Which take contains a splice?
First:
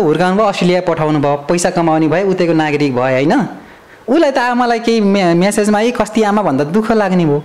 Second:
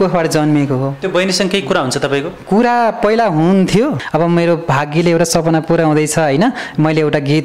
second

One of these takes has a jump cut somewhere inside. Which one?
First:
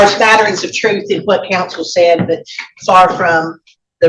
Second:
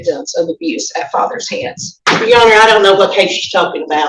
second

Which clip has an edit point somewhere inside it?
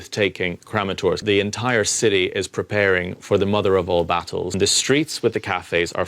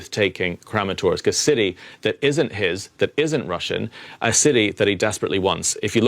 first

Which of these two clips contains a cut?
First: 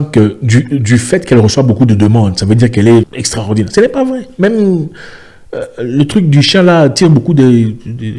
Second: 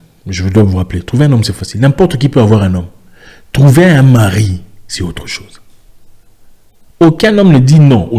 first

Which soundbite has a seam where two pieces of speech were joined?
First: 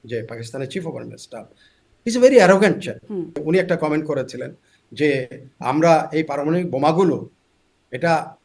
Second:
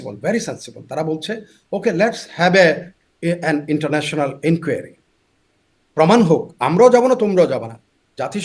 first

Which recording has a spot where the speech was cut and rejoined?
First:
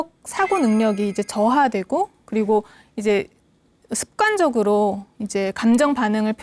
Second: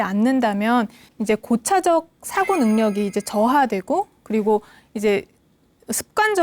second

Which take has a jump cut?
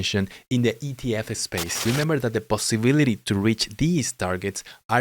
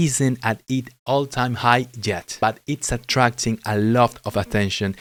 first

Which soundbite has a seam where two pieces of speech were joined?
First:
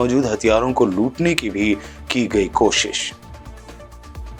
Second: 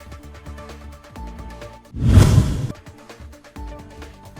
second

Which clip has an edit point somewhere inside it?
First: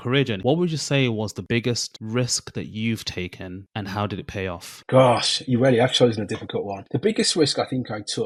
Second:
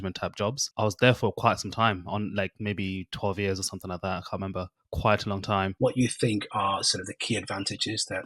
second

